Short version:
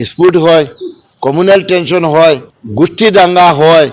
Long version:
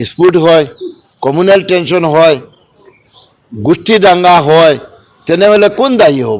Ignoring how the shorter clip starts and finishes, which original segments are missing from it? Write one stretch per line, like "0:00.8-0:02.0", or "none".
0:02.6-0:03.4